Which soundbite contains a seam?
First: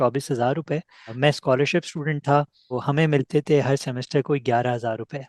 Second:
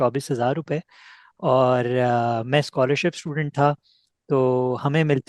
first; 2 cuts; at 1.1 s, 2.8 s

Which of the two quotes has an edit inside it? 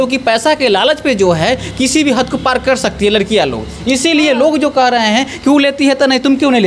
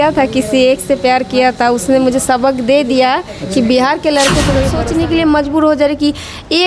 second; 1 cut; at 4.8 s

